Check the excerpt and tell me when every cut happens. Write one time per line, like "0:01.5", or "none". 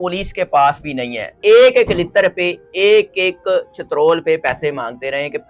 0:01.4